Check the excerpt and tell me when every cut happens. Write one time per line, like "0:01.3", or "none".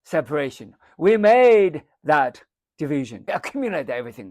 0:03.2